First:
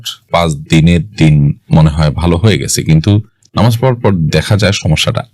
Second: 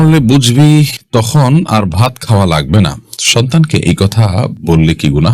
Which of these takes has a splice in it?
first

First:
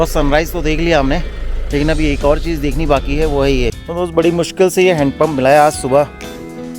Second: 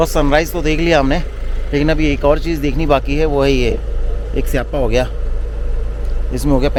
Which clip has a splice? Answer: first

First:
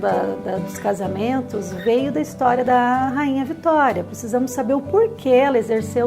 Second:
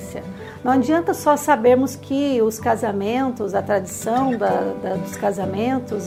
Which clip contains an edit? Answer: first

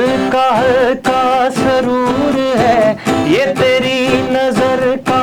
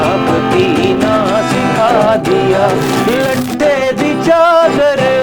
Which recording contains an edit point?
second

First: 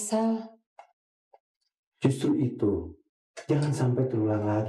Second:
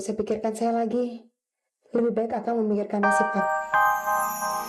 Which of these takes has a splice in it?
second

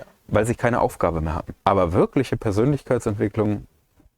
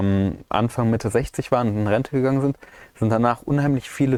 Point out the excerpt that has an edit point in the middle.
first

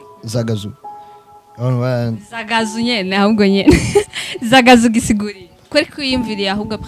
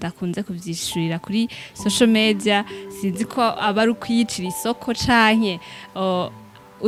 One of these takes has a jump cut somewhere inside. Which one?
first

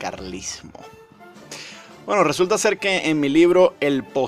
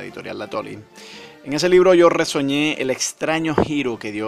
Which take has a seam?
first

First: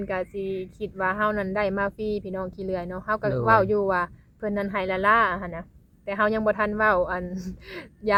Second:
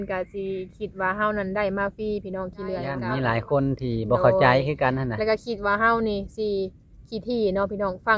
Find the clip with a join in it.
second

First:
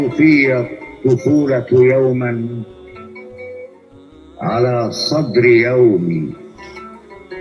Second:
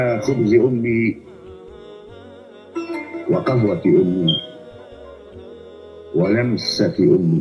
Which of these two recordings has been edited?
second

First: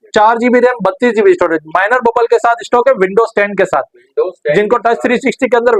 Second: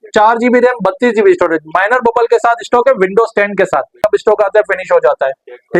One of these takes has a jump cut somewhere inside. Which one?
second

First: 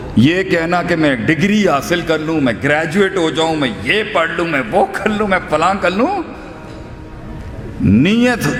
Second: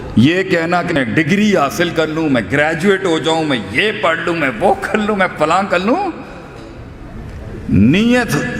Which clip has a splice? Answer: second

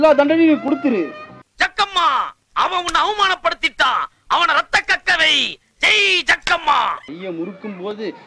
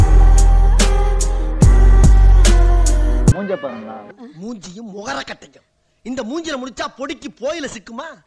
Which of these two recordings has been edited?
second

